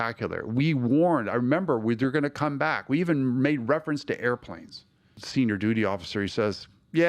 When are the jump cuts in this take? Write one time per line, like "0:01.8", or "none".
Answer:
0:05.2